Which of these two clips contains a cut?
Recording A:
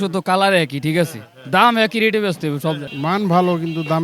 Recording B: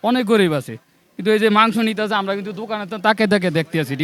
A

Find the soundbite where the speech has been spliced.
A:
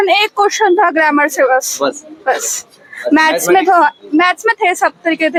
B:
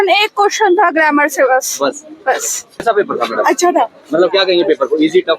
B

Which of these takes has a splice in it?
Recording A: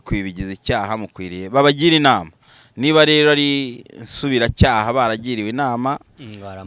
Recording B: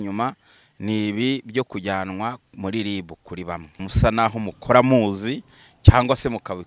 B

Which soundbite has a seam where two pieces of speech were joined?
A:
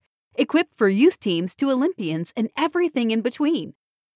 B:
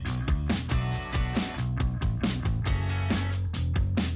B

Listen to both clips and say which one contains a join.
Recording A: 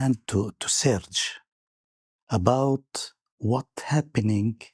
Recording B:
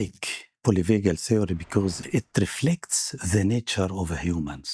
B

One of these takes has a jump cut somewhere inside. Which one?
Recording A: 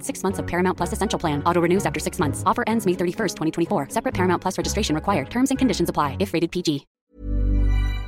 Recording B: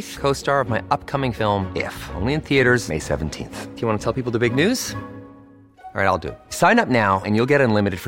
A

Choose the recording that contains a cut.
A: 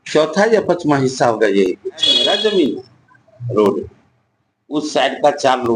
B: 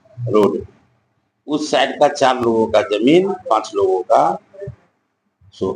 A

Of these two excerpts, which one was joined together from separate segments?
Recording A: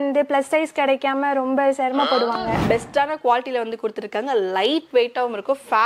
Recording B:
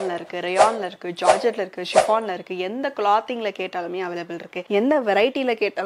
A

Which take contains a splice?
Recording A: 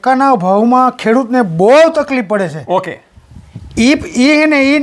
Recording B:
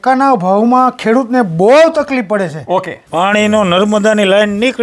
B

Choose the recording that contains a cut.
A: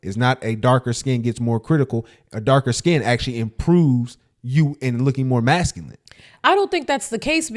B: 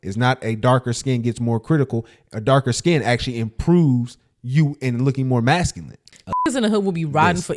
B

